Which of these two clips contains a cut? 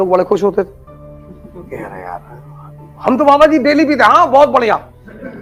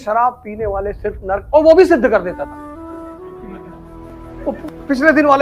second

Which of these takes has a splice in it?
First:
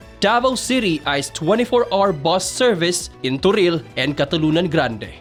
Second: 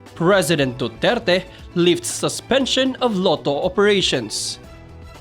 second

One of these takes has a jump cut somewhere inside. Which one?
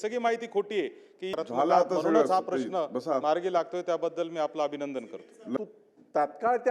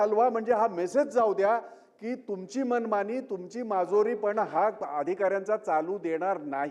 first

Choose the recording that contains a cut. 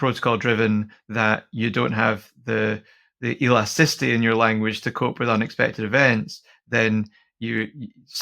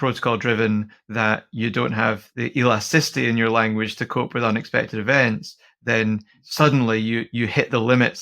second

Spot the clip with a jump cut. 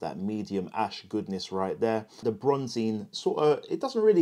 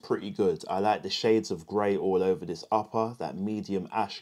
first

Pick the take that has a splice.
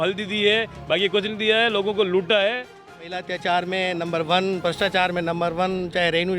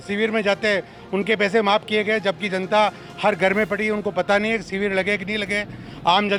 first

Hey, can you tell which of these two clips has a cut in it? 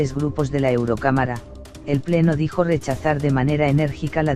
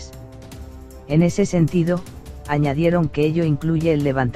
first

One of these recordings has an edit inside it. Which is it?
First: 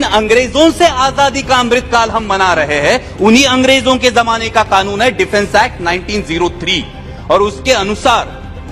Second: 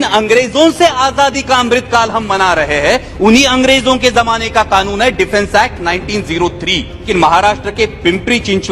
second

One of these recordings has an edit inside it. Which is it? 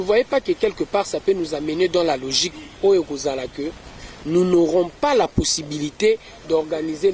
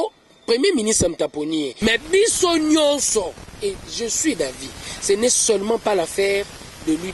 second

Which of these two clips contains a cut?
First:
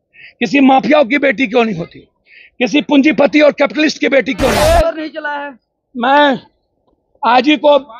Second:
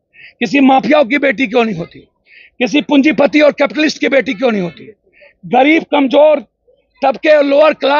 first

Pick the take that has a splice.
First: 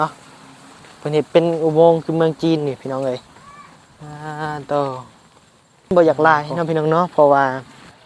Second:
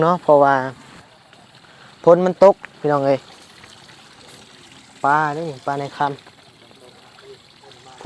first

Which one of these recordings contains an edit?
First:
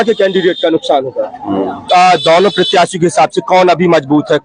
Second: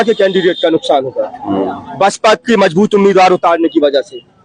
first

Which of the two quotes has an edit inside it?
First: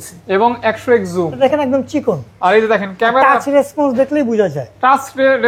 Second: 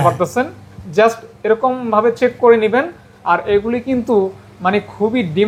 first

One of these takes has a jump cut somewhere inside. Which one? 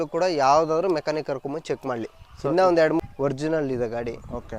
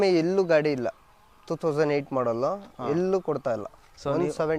first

